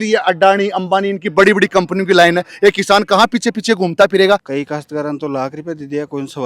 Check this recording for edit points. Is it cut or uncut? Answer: cut